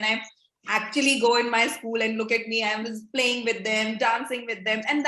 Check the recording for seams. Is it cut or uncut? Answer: uncut